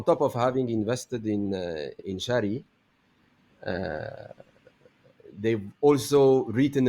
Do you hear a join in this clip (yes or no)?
yes